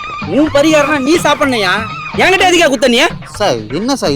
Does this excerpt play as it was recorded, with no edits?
yes; 0 cuts

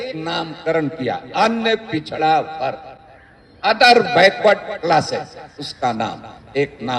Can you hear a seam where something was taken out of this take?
no; 0 cuts

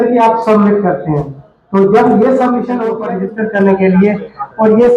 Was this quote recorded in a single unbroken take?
no; 1 cut; at 3.1 s

